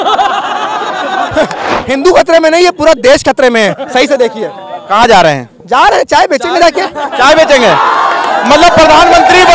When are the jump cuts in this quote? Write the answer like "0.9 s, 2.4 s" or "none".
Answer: 1.7 s